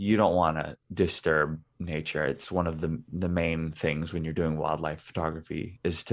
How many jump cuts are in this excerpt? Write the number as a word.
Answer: zero